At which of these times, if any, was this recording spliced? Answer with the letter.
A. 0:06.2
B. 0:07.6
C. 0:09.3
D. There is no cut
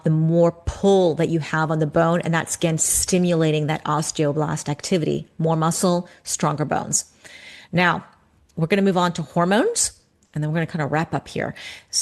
D